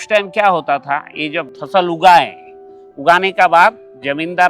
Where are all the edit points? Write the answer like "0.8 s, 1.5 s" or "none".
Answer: 1.5 s